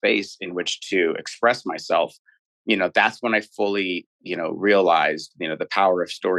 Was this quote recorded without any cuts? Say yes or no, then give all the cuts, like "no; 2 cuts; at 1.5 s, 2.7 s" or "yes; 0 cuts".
yes; 0 cuts